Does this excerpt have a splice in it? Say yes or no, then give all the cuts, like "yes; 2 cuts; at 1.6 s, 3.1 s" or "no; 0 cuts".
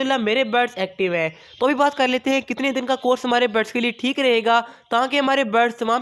no; 0 cuts